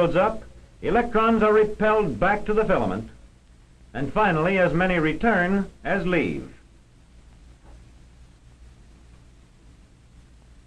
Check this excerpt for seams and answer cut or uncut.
uncut